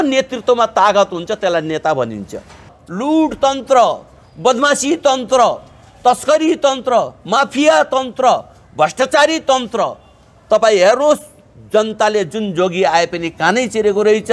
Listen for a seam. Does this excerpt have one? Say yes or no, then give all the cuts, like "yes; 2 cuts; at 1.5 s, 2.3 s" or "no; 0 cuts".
yes; 1 cut; at 2.8 s